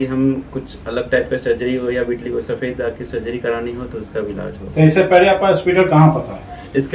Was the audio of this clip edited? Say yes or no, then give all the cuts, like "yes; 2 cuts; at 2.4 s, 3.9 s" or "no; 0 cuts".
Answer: no; 0 cuts